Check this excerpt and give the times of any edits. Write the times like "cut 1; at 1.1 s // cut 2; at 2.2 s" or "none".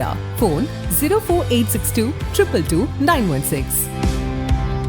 none